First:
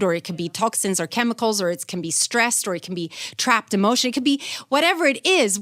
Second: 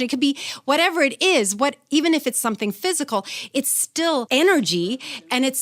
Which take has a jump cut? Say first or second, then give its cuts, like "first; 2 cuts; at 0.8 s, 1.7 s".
second; 1 cut; at 4.3 s